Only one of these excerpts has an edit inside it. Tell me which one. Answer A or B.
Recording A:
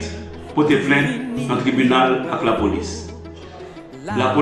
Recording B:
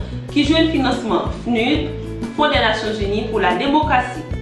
B